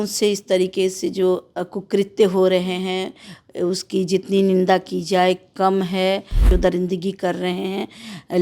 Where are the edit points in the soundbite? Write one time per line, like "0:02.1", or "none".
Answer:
0:06.5